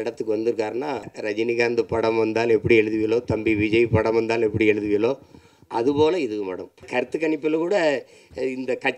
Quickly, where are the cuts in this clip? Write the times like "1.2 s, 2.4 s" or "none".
1.1 s, 6.8 s